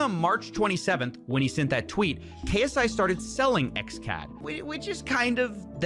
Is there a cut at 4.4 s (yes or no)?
yes